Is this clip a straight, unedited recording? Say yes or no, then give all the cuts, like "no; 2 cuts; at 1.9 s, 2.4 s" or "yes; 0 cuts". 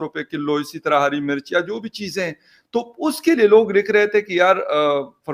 yes; 0 cuts